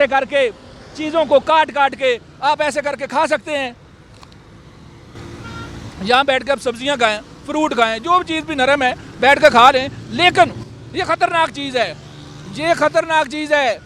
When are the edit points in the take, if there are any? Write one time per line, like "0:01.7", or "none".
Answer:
none

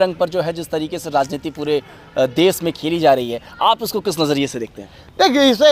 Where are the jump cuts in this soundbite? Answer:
none

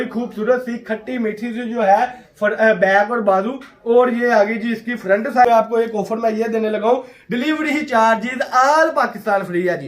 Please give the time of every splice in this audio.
0:05.5

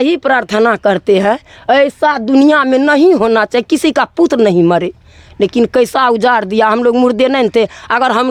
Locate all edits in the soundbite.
none

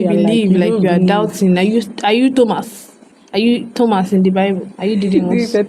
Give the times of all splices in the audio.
none

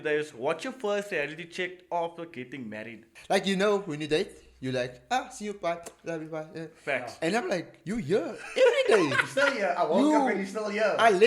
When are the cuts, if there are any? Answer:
0:03.1
0:07.8

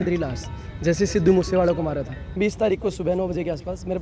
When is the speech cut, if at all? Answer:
0:02.4

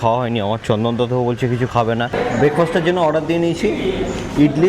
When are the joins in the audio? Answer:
0:02.1

